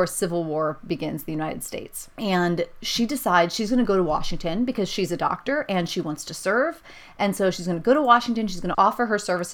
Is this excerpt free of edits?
yes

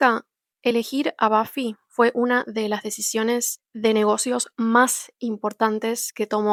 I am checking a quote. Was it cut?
no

